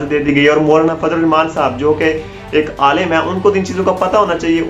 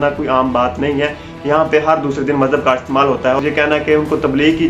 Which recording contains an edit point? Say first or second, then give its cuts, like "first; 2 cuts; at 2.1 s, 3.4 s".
second; 1 cut; at 3.4 s